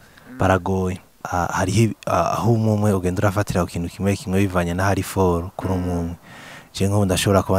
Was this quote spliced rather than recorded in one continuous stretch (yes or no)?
yes